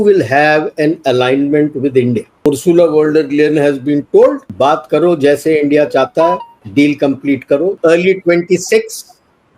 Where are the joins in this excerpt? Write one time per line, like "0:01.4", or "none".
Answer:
0:02.5
0:04.4
0:06.5
0:07.8